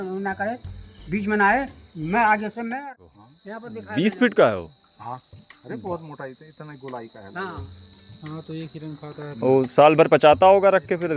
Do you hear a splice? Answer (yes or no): yes